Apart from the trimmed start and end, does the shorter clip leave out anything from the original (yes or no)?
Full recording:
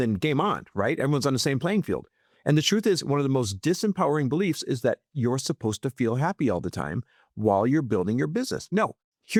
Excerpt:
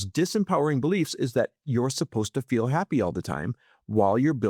no